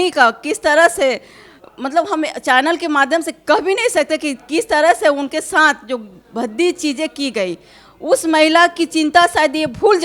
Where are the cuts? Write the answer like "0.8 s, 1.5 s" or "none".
none